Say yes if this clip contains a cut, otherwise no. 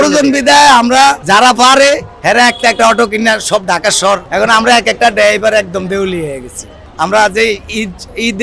yes